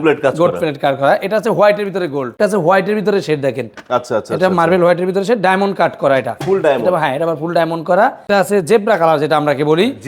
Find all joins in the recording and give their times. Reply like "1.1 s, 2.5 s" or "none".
2.4 s, 8.3 s